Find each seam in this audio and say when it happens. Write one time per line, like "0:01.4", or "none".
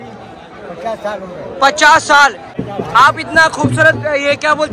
0:02.5